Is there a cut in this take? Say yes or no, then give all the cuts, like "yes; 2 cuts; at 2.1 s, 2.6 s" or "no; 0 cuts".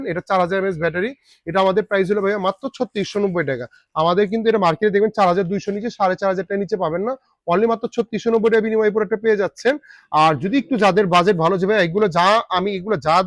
no; 0 cuts